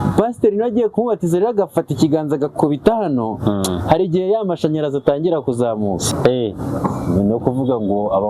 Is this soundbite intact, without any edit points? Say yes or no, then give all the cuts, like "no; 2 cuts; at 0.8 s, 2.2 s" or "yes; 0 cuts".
no; 1 cut; at 6.0 s